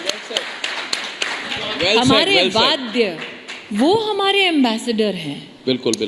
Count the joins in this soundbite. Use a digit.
1